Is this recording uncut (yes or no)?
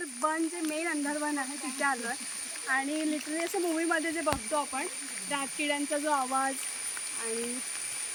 yes